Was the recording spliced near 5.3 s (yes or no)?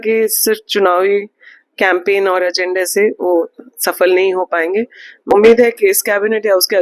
yes